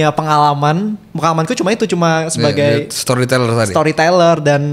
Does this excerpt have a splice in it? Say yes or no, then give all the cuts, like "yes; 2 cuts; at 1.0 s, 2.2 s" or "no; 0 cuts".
no; 0 cuts